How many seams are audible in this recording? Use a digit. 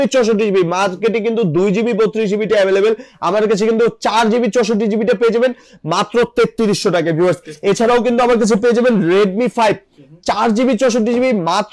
0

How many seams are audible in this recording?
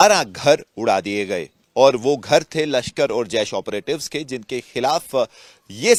0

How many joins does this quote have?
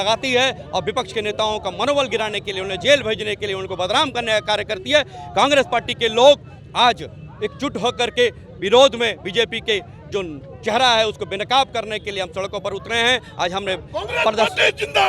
0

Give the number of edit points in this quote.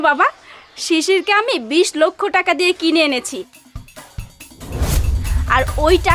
0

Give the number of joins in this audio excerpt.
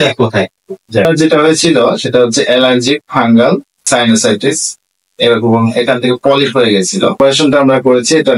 2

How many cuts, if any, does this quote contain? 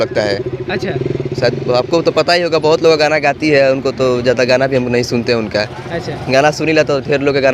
0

